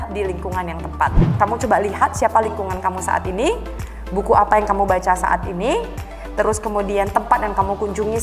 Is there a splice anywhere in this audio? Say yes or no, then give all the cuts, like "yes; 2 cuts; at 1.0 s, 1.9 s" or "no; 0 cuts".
yes; 1 cut; at 1.2 s